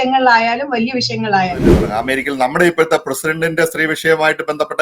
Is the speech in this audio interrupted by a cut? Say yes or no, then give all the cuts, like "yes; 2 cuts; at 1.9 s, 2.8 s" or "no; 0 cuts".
yes; 1 cut; at 1.8 s